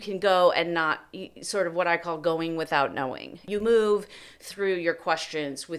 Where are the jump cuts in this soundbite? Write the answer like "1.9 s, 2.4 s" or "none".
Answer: none